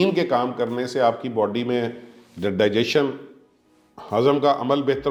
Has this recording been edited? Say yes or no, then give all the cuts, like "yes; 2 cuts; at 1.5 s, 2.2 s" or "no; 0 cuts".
no; 0 cuts